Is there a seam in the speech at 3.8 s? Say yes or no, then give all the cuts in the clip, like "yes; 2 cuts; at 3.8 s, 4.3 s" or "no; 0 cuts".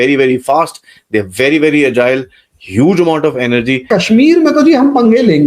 yes; 1 cut; at 3.8 s